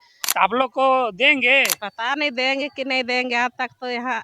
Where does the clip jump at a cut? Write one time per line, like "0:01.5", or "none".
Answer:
0:01.8